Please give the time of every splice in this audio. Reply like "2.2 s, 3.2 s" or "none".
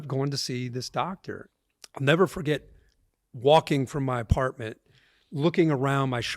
1.5 s